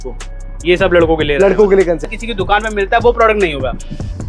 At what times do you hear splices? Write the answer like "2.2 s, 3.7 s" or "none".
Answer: 2.1 s